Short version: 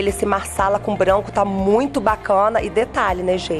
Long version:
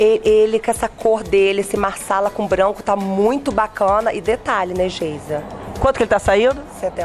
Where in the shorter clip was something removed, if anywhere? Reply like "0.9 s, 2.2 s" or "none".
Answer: none